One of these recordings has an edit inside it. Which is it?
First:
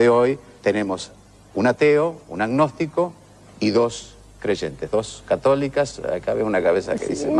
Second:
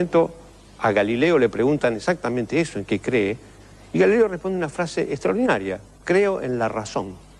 first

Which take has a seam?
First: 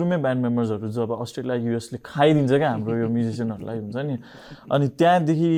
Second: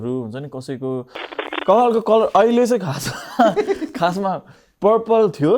second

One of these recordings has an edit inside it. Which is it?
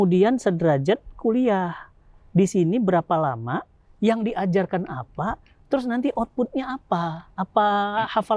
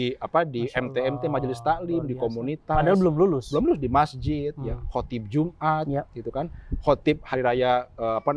first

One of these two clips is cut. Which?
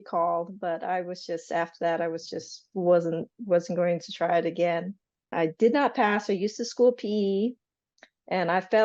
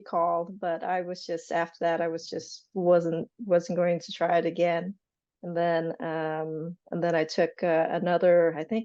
first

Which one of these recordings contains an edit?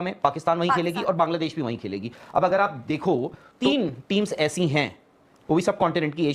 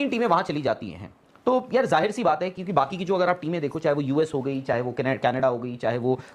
first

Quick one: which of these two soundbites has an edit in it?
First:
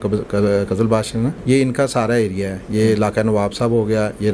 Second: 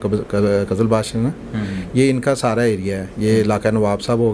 first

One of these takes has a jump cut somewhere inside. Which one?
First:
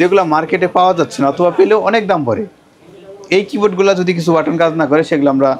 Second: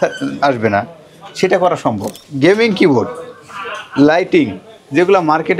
second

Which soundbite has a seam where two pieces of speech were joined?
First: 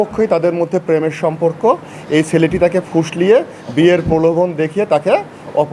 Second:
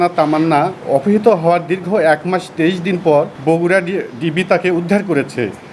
second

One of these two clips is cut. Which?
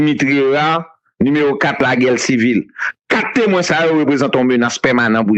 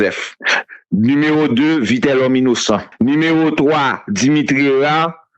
second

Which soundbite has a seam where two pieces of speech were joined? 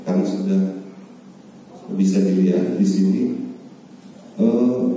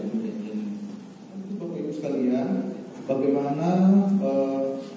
second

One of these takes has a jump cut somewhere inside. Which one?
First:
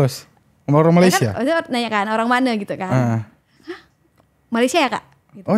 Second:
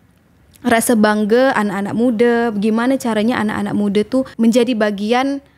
second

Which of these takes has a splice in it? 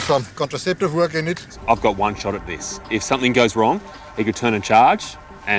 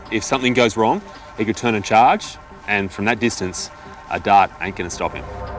first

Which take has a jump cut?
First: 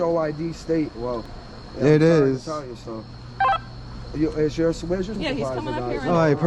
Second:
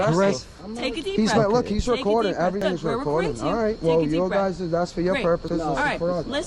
second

